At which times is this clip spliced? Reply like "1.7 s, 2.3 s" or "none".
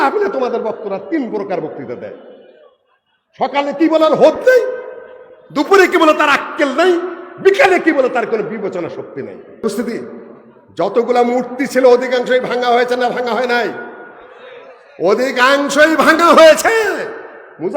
9.6 s